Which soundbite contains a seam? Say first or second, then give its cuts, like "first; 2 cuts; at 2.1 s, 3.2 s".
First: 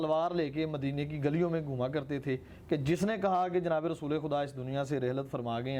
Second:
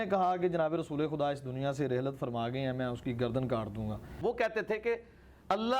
second; 1 cut; at 4.1 s